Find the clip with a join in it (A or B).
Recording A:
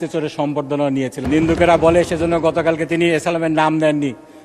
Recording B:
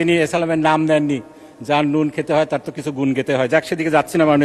A